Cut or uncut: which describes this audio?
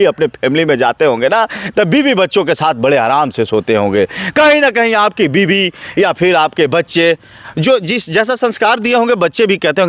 uncut